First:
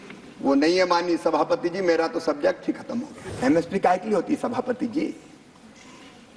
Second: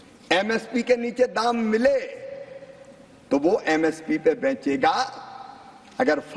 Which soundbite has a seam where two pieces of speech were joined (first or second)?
first